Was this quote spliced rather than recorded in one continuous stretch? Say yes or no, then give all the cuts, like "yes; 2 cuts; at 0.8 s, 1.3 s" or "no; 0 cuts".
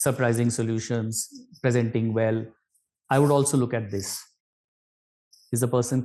no; 0 cuts